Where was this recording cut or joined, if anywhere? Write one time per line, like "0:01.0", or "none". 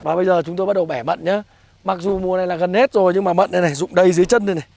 none